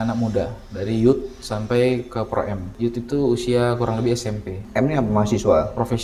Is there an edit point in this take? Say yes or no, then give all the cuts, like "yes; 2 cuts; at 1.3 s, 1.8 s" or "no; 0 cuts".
yes; 2 cuts; at 2.7 s, 4.6 s